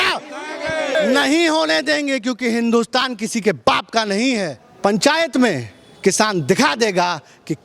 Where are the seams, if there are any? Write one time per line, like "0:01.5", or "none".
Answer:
0:00.9
0:04.6